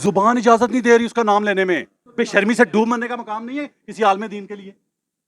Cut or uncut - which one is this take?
cut